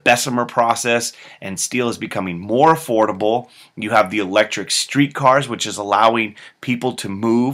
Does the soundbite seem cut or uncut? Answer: uncut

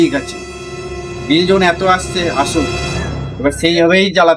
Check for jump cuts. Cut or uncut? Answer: uncut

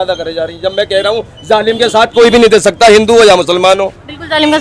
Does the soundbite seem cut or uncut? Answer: uncut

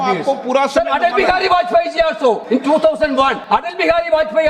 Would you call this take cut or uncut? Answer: cut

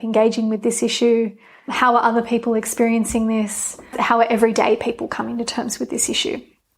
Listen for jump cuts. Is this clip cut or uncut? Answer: cut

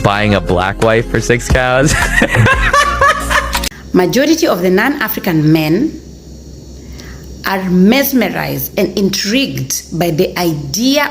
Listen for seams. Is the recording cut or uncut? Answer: cut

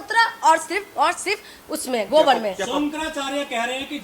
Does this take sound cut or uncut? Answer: uncut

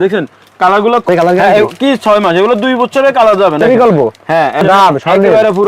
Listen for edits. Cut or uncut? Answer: cut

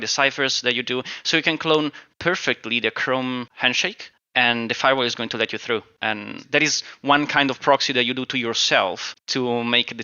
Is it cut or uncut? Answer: cut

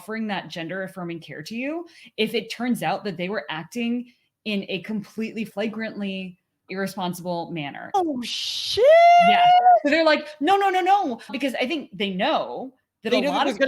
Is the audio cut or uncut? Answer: cut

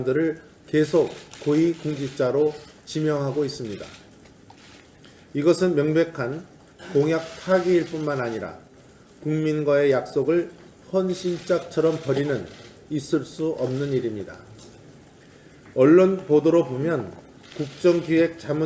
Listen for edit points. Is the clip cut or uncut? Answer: cut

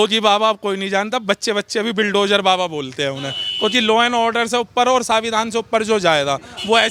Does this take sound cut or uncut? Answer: uncut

